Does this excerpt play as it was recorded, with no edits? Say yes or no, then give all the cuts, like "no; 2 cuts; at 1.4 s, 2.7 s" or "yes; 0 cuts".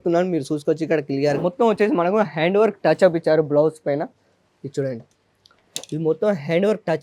no; 1 cut; at 1.4 s